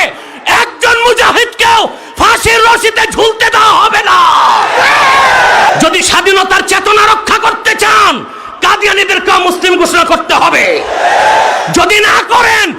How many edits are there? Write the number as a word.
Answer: one